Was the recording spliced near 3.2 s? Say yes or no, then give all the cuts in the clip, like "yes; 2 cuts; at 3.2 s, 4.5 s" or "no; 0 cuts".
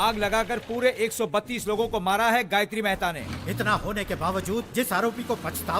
yes; 1 cut; at 3.2 s